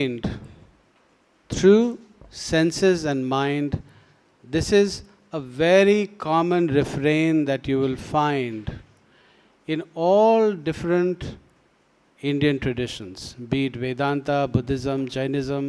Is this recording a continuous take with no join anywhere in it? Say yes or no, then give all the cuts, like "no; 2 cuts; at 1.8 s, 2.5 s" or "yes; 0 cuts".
yes; 0 cuts